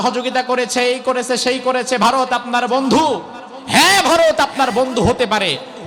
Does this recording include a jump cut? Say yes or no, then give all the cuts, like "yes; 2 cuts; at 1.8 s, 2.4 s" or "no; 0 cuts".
no; 0 cuts